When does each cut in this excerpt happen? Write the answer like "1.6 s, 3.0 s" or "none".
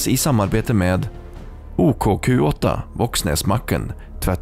none